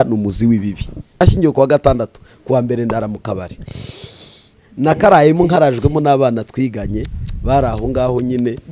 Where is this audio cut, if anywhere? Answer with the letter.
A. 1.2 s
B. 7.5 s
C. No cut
A